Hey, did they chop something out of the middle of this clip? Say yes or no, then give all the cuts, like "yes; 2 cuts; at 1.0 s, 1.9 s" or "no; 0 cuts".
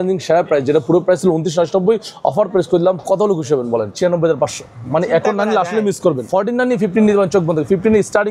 yes; 2 cuts; at 3.9 s, 6.2 s